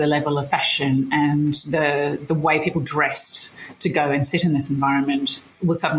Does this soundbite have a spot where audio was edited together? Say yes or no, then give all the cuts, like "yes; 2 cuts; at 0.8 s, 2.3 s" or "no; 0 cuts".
no; 0 cuts